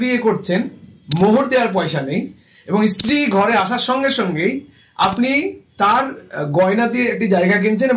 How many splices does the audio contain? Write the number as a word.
zero